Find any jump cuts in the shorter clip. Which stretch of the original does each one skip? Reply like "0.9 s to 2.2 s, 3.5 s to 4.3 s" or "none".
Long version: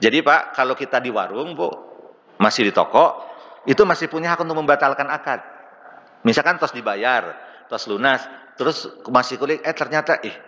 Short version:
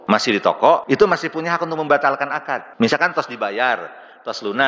3.1 s to 3.6 s, 5.4 s to 6.1 s